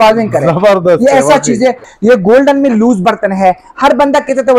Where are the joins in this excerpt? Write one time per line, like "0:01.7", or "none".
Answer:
0:01.8